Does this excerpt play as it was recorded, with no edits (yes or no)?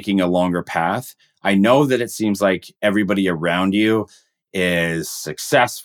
yes